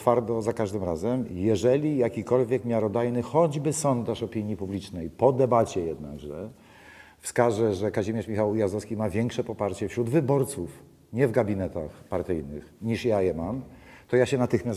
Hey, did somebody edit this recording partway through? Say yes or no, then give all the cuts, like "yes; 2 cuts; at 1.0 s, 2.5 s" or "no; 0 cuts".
no; 0 cuts